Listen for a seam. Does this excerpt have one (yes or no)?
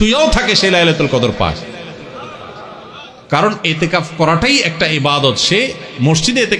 no